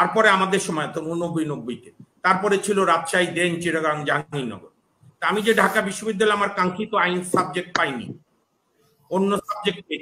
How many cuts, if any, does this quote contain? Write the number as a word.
zero